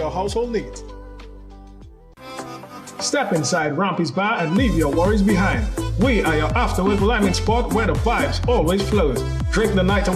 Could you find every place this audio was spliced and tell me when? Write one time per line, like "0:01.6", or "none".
0:02.0